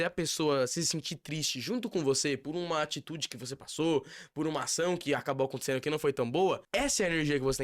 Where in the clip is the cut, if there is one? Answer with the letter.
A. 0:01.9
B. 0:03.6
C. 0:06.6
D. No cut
C